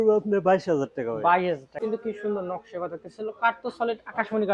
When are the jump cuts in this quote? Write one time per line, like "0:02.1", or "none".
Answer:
0:01.7